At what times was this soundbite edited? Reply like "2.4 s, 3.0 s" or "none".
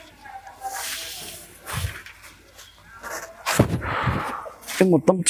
none